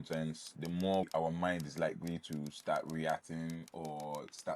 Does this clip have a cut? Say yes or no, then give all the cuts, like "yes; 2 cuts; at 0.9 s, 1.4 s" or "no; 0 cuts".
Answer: yes; 1 cut; at 1.1 s